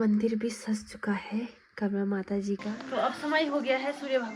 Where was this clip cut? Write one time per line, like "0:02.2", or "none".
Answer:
0:02.8